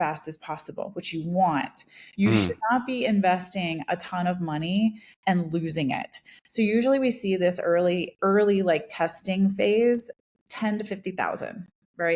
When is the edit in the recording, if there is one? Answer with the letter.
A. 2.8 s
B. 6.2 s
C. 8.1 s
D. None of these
D